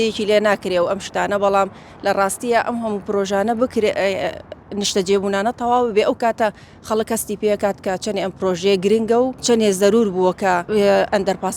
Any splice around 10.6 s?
yes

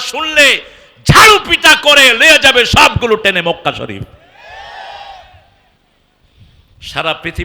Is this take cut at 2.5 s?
no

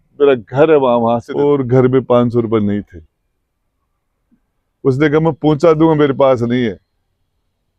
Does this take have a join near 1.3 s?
yes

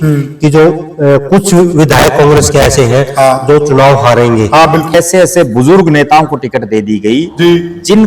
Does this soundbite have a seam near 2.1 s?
no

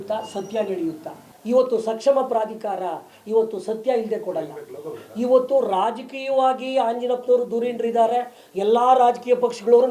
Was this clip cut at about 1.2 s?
yes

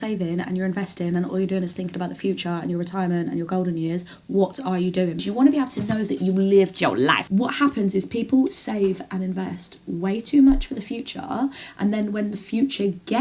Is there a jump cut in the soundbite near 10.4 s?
no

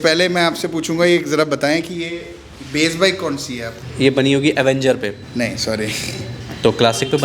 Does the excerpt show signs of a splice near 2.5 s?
no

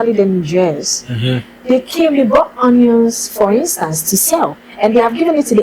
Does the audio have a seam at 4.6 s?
yes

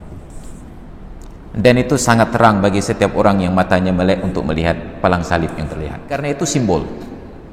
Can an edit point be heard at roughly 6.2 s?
yes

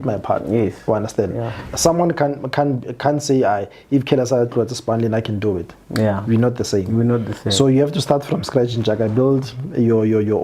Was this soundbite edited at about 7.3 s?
no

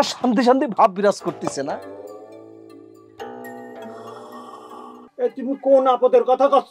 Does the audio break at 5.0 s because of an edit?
yes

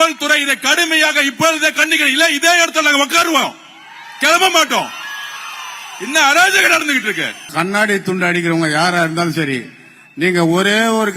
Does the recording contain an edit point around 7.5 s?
yes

